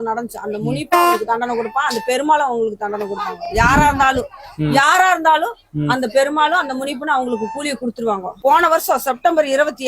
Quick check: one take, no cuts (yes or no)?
yes